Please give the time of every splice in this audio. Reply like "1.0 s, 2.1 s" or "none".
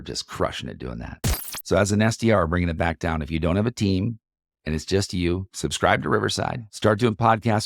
1.2 s, 5.5 s, 6.7 s